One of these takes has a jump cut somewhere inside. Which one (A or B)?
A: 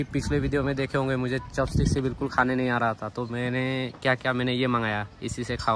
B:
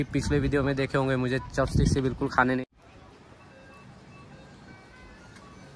B